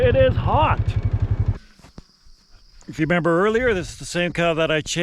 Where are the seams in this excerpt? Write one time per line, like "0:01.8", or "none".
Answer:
0:01.6